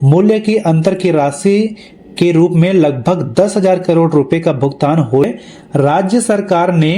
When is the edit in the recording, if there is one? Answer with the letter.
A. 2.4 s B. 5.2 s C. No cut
B